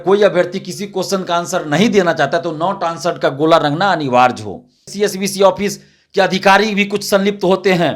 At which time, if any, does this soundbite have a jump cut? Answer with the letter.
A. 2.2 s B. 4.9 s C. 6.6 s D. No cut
B